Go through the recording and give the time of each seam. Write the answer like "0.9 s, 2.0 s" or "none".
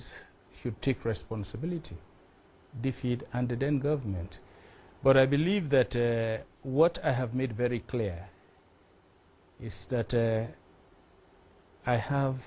none

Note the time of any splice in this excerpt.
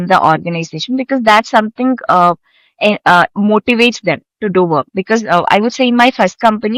none

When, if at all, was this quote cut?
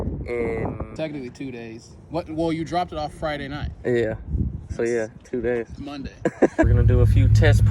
0.9 s, 6.7 s

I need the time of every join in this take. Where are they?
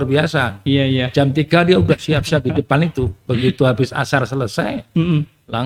none

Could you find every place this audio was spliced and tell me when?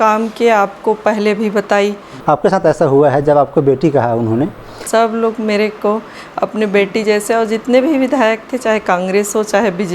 2.1 s, 4.7 s

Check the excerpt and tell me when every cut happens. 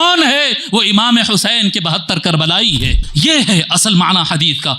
3.0 s

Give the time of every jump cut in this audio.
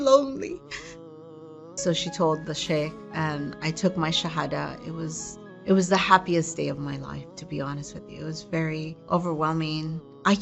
1.7 s

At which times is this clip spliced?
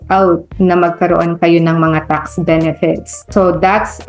none

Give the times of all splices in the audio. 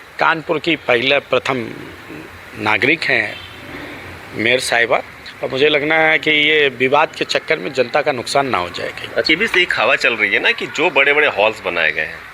9.3 s

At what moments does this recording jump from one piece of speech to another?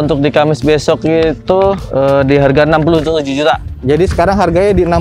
none

